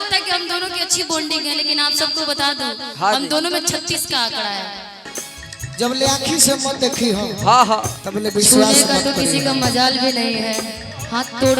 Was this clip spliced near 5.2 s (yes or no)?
yes